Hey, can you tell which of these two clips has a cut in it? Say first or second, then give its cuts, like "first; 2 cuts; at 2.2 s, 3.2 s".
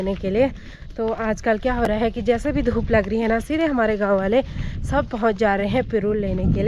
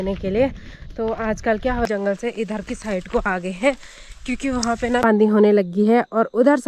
second; 2 cuts; at 1.9 s, 5.0 s